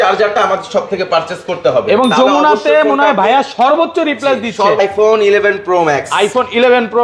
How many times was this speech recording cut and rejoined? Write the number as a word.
one